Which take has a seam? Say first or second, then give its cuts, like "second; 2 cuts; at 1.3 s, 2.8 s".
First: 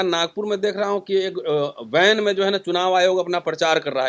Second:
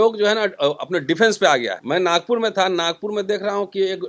second; 1 cut; at 1.8 s